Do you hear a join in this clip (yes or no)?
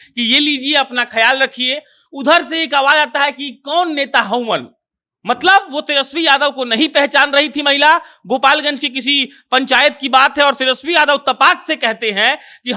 no